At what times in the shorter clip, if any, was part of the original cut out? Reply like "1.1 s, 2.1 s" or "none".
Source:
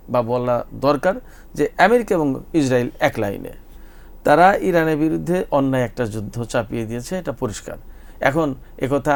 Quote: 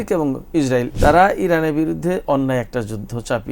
0.9 s